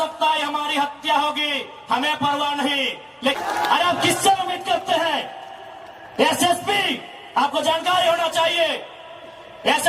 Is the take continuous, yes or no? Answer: no